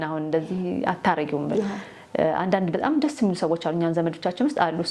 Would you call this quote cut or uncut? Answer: uncut